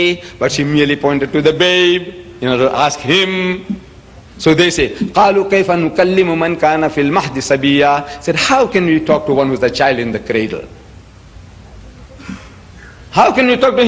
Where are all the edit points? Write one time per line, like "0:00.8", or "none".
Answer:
0:12.1